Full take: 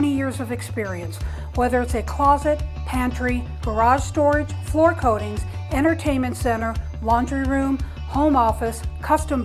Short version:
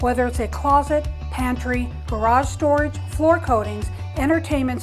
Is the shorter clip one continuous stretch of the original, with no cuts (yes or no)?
yes